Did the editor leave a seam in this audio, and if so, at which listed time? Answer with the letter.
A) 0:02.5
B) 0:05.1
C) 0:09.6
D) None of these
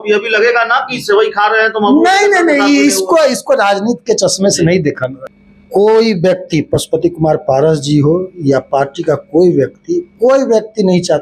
B